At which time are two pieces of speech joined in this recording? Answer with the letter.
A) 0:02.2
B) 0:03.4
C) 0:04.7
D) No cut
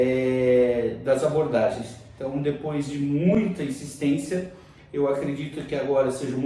D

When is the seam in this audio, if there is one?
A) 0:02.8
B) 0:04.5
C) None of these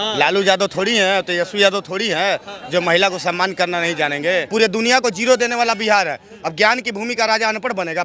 B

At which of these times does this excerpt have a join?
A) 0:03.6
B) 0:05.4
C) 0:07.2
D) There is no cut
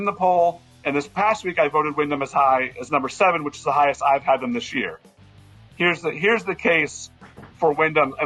D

